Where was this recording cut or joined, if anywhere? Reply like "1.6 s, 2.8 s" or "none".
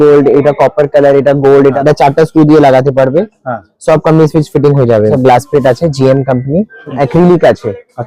1.8 s, 5.1 s, 6.9 s